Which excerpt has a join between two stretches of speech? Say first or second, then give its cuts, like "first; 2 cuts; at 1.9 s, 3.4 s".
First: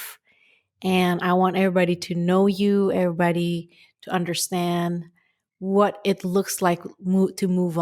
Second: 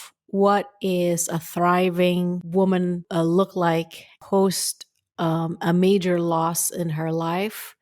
second; 3 cuts; at 2.4 s, 3.0 s, 4.2 s